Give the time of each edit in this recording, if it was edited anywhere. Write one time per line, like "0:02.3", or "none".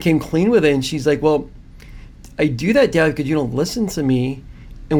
none